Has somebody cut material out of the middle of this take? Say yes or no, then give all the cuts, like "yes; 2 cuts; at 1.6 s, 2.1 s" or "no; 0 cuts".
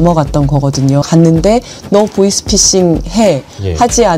yes; 1 cut; at 1.0 s